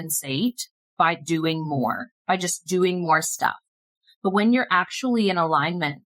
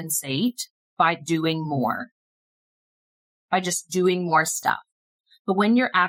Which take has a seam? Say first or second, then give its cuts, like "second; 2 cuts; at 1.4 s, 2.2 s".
first; 1 cut; at 2.1 s